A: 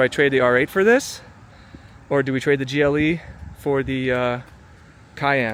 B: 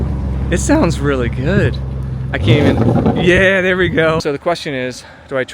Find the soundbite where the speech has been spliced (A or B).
B